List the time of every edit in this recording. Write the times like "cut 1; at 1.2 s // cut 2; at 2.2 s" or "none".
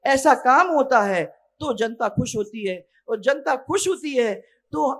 none